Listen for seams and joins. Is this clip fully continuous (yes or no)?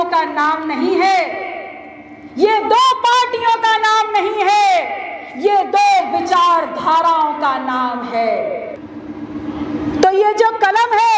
no